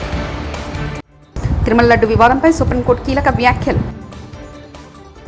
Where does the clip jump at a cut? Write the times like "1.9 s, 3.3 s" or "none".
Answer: 1.1 s